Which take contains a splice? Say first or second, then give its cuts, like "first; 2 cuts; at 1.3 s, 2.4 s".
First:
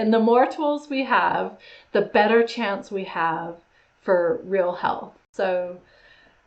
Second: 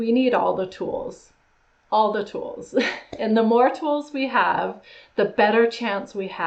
first; 1 cut; at 5.2 s